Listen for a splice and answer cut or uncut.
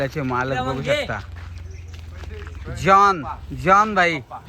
uncut